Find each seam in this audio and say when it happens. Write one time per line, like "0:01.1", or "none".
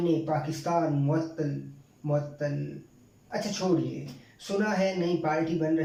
none

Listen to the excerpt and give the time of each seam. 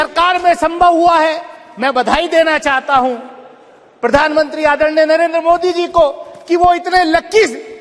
none

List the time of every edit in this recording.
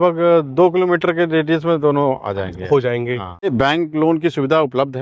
0:03.5

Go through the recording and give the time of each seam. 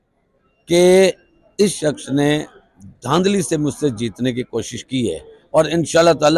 none

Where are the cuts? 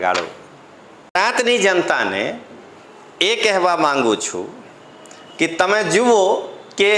0:01.2

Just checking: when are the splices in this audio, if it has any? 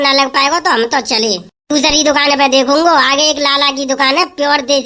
none

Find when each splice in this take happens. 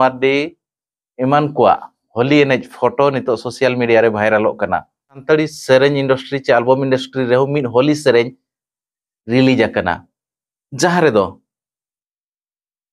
0:05.2

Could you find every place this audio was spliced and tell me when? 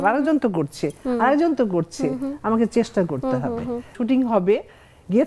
0:04.0

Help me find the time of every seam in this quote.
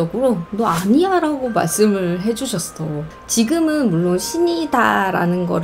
0:03.1

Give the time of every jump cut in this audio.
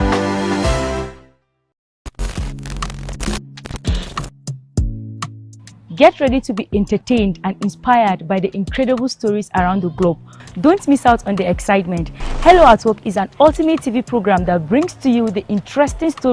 0:01.9

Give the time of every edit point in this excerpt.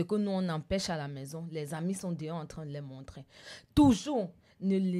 0:03.4

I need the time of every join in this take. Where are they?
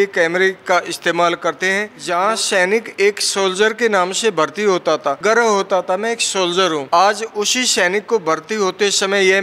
0:01.9
0:05.2
0:06.8

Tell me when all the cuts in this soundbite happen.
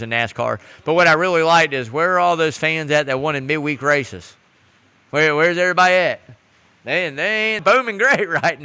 0:07.6

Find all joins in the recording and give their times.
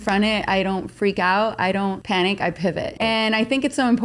0:02.0
0:03.0

